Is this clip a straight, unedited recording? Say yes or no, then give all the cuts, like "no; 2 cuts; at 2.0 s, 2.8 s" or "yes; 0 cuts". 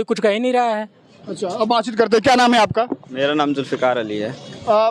yes; 0 cuts